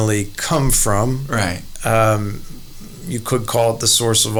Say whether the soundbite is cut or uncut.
uncut